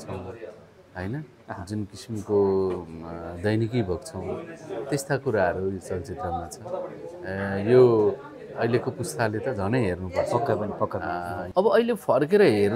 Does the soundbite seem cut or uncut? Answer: cut